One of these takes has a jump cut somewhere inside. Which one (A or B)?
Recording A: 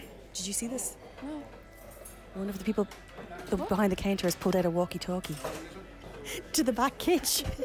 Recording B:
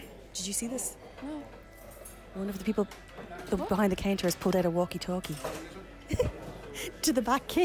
A